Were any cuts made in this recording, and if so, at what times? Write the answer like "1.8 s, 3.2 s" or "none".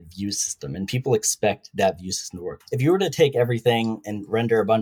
2.5 s